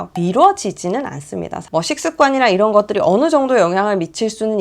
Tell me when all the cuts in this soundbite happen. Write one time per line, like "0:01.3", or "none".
0:01.7